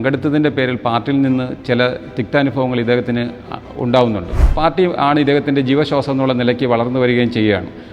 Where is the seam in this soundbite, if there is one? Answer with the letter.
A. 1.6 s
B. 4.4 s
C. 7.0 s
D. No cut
B